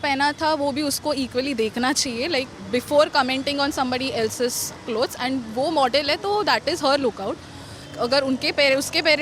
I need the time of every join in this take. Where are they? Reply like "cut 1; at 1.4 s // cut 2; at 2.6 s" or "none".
none